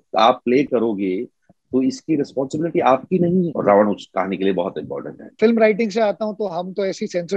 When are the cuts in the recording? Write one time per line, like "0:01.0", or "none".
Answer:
0:03.5
0:05.4